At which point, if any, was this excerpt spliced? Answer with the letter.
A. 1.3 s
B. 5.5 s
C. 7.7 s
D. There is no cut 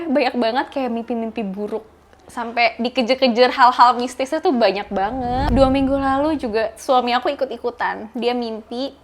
B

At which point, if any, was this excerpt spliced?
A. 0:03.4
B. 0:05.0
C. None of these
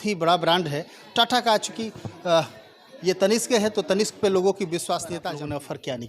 B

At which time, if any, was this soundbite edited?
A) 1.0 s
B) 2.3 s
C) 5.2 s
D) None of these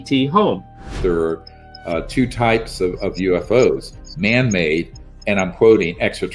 A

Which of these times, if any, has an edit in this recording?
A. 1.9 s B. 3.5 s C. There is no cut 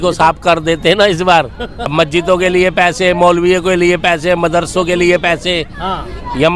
A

